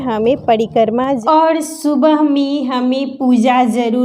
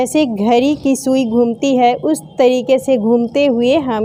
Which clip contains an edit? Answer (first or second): first